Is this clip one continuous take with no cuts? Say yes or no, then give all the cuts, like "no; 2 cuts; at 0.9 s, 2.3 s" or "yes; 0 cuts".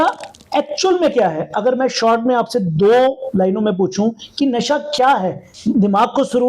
no; 1 cut; at 5.5 s